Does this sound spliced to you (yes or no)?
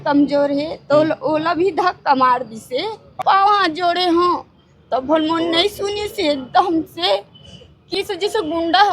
yes